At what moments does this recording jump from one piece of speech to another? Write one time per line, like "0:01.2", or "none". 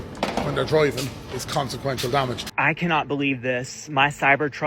0:02.5